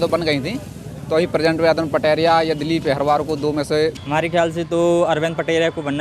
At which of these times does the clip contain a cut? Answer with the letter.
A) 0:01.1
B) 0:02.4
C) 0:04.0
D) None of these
C